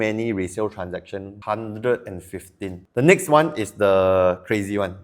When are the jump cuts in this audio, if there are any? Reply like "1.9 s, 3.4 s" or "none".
1.3 s, 2.8 s

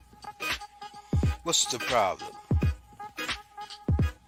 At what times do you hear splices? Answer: none

